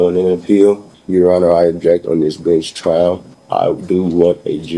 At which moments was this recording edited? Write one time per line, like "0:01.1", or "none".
0:00.9
0:03.3